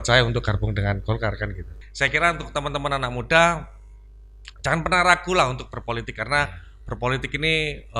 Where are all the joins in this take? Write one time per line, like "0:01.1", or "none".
0:01.7